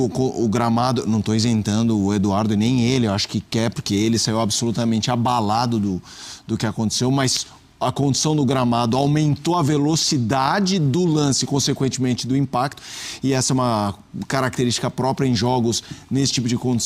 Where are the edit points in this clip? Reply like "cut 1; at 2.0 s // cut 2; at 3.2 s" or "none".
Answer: none